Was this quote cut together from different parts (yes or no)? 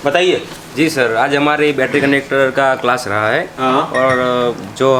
no